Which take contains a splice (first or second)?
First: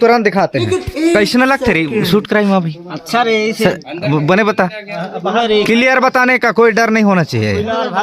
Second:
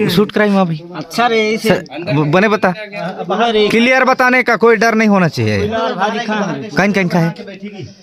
first